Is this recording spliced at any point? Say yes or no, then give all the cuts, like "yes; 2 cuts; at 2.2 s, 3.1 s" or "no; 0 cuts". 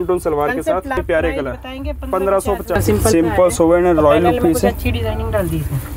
yes; 2 cuts; at 1.0 s, 2.8 s